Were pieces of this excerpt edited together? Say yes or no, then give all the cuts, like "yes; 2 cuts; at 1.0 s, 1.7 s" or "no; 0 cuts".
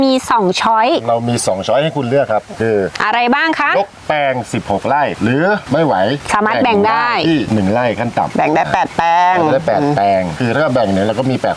no; 0 cuts